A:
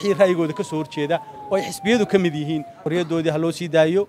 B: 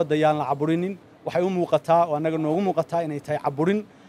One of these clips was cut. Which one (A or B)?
A